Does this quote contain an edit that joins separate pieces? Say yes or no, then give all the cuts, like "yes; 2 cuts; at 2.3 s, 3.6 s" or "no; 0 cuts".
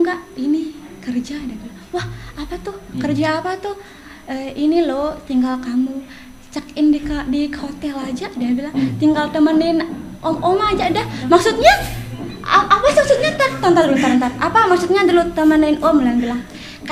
no; 0 cuts